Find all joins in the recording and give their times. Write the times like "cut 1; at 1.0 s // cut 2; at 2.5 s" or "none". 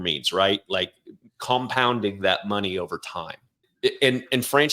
cut 1; at 3.7 s